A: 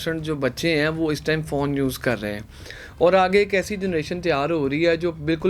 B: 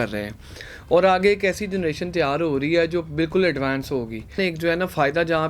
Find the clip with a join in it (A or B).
B